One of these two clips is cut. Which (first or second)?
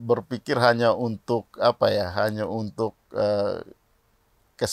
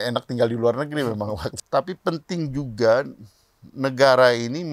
second